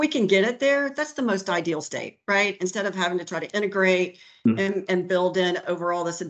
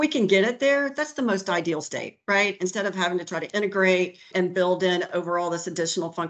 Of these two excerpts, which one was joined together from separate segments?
second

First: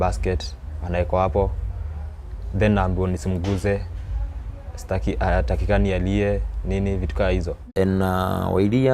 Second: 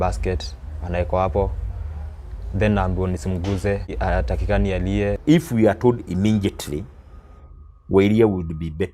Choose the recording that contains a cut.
second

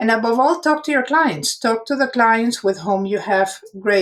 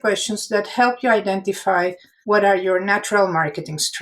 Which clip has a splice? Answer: second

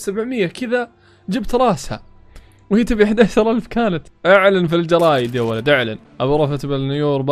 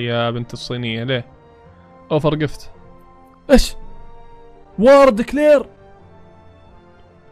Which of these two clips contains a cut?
first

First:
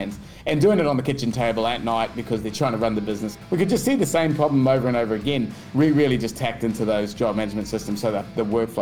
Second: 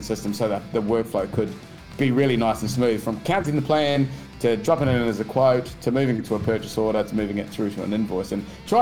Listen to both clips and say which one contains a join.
first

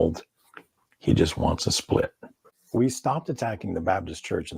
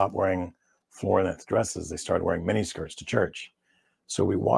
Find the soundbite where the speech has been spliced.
first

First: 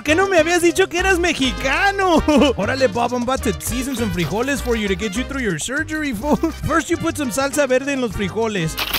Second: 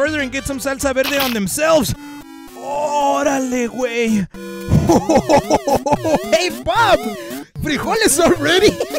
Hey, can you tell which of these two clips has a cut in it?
first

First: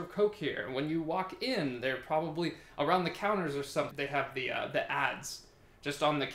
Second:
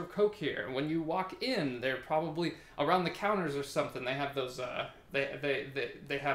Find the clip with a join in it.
first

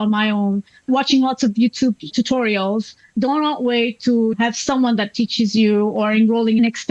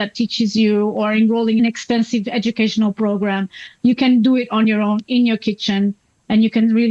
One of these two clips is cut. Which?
first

